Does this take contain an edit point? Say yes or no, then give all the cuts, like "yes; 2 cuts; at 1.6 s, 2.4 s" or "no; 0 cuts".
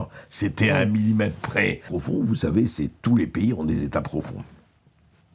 yes; 1 cut; at 1.9 s